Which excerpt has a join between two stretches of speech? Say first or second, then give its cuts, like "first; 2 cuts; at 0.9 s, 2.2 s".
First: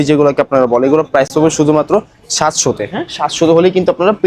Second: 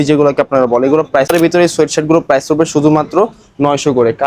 second; 1 cut; at 1.3 s